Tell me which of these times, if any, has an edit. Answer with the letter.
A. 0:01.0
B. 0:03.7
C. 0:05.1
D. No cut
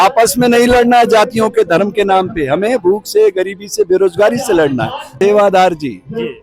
C